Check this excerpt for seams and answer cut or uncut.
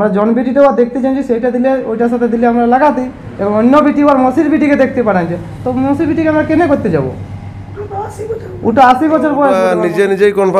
cut